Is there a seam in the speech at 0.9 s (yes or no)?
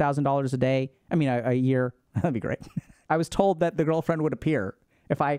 no